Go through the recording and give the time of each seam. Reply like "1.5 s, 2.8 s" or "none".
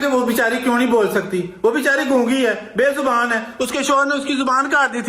none